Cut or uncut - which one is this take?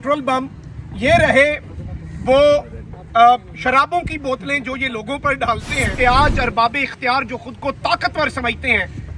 cut